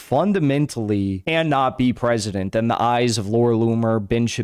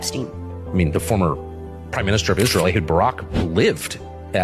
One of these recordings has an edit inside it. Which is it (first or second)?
first